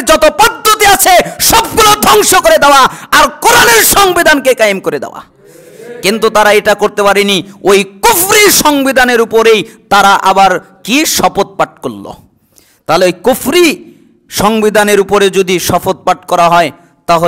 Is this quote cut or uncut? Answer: uncut